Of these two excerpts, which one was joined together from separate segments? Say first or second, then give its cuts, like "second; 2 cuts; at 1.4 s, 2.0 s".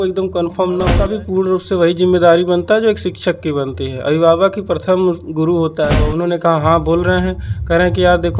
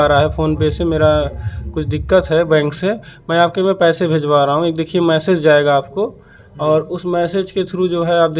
first; 2 cuts; at 1.0 s, 6.0 s